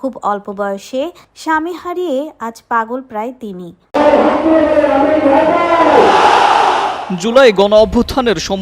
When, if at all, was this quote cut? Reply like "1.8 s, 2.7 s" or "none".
3.8 s